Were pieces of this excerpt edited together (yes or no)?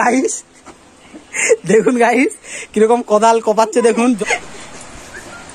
yes